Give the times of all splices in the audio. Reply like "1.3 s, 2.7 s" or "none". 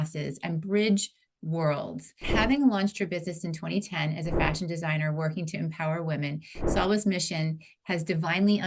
2.3 s